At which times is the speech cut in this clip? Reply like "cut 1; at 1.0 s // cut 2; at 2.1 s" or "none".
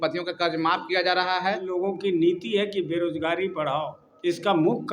cut 1; at 1.7 s // cut 2; at 4.0 s